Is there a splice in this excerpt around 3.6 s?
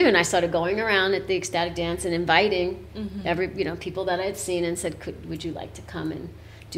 no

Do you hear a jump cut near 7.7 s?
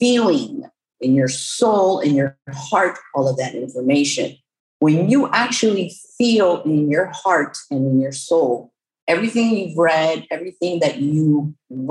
no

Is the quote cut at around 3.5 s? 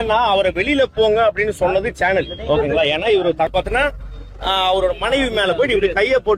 yes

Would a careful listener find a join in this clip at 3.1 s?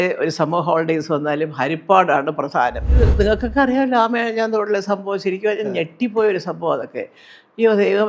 yes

